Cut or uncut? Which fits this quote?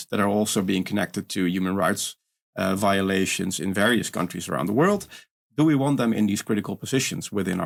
uncut